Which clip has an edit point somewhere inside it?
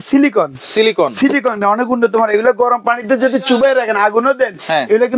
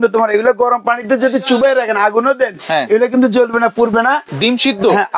second; 1 cut; at 4.3 s

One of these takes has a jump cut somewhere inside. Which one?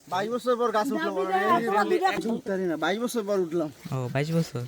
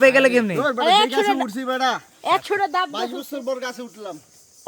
first; 1 cut; at 2.2 s

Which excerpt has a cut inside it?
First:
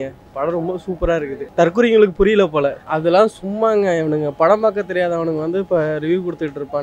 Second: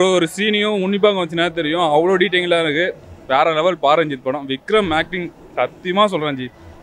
first; 2 cuts; at 1.4 s, 2.9 s

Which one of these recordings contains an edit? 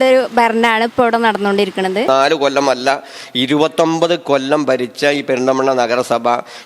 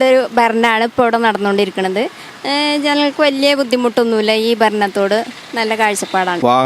first; 1 cut; at 2.1 s

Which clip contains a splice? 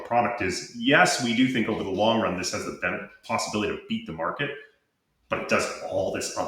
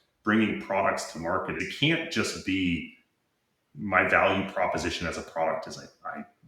second; 1 cut; at 1.7 s

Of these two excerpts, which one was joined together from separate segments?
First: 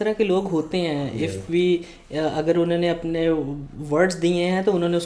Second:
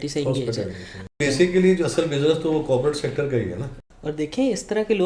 second; 2 cuts; at 1.1 s, 3.8 s

